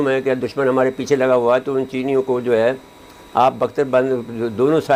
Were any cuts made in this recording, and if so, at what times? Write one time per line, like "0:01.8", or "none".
none